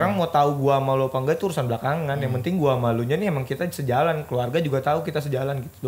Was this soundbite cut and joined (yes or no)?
no